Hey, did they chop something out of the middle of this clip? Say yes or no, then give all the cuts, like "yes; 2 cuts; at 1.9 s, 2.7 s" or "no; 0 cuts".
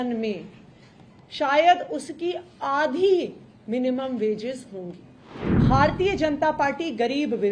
yes; 1 cut; at 5.6 s